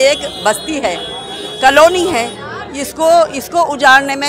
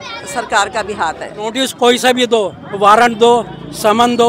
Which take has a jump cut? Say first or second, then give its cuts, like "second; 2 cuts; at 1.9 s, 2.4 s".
second; 1 cut; at 1.6 s